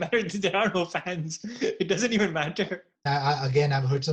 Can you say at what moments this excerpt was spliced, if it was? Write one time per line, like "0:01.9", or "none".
0:03.1